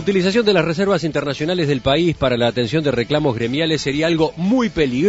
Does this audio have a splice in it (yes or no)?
yes